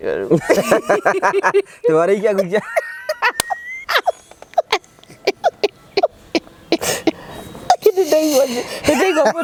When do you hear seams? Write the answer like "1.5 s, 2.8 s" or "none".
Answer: none